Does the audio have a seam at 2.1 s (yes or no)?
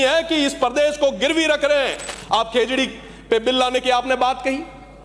yes